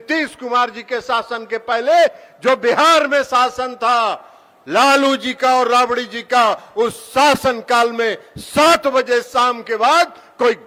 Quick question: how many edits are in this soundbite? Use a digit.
0